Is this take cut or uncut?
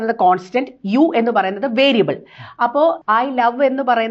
cut